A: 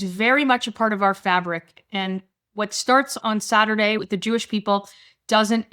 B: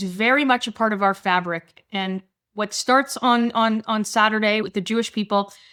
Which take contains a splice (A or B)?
A